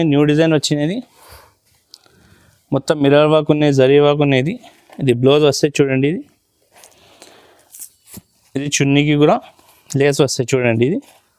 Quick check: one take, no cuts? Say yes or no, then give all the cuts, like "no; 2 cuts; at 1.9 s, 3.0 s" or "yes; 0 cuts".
yes; 0 cuts